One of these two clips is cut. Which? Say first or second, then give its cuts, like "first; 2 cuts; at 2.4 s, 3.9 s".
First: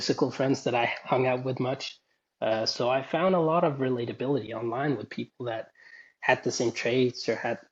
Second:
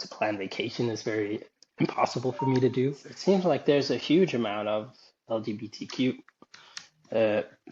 second; 1 cut; at 3.1 s